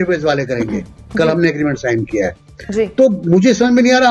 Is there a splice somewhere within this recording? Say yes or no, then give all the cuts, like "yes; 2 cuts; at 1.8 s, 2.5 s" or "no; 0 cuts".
no; 0 cuts